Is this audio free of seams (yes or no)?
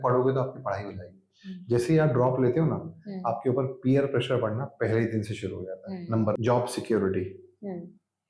no